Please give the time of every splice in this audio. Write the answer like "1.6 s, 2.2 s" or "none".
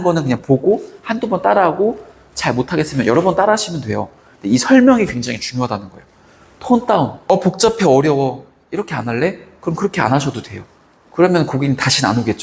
7.2 s